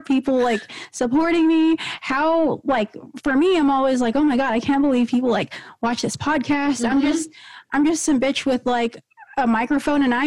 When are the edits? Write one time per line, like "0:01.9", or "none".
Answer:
none